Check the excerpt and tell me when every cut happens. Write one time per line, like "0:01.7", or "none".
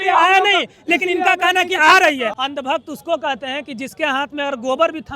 0:02.3